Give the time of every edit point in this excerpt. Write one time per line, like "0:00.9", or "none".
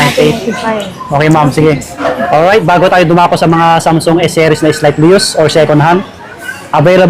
0:02.0